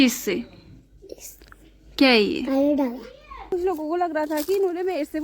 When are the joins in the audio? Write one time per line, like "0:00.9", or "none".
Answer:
0:03.5